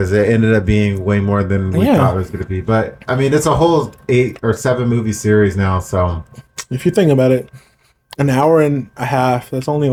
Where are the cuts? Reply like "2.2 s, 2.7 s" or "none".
none